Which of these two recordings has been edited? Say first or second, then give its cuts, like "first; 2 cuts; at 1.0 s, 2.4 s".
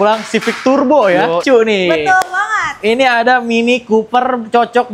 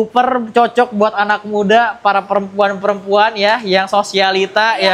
first; 1 cut; at 1.4 s